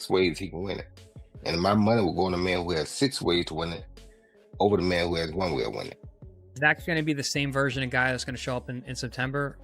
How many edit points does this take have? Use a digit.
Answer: 1